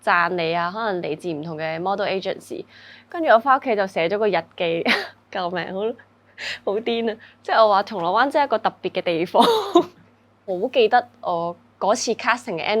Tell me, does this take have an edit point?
yes; 1 cut; at 10.4 s

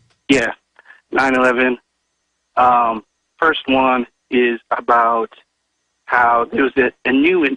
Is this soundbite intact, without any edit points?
no; 1 cut; at 1.1 s

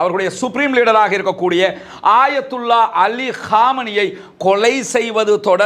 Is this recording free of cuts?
yes; 0 cuts

